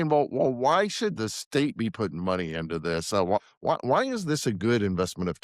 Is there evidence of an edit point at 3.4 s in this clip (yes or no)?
yes